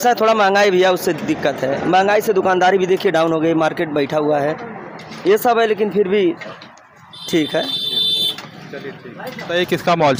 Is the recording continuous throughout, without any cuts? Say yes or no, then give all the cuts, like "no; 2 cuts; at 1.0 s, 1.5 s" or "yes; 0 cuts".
yes; 0 cuts